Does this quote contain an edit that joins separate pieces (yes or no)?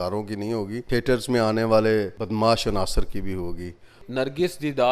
yes